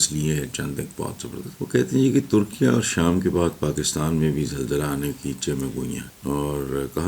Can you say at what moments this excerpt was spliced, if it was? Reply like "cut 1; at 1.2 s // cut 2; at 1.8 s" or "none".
cut 1; at 1.6 s // cut 2; at 6.1 s

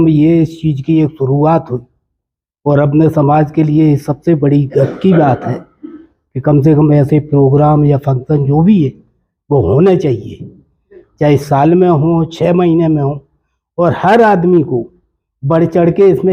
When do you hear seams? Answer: none

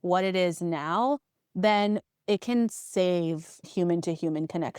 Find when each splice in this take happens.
cut 1; at 2.1 s // cut 2; at 3.7 s

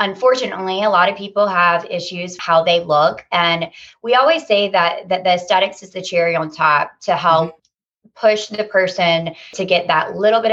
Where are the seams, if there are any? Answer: cut 1; at 7.6 s

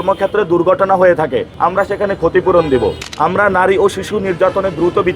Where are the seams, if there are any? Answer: cut 1; at 1.5 s // cut 2; at 3.0 s

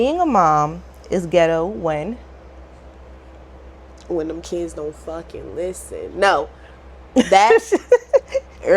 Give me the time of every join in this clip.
none

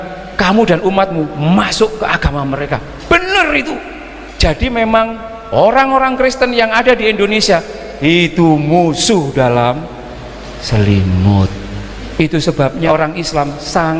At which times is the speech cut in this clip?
cut 1; at 12.9 s

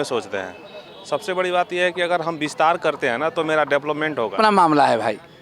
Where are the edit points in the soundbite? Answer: cut 1; at 4.4 s

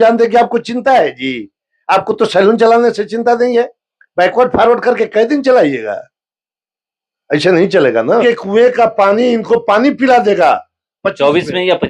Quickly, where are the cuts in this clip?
cut 1; at 8.2 s

